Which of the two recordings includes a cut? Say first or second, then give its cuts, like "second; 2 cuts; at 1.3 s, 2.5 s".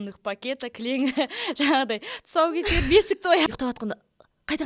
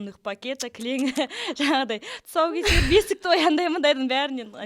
first; 1 cut; at 3.5 s